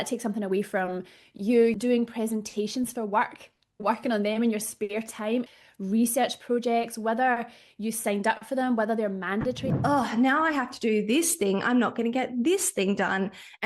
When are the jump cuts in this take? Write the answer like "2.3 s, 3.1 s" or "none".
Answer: 1.8 s, 5.5 s, 9.6 s